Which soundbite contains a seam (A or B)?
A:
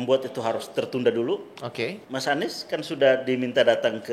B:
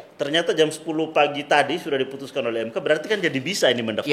A